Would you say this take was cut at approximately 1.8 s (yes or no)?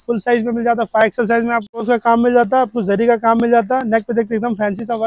yes